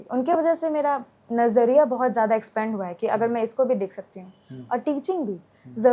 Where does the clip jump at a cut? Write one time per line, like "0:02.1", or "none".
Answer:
none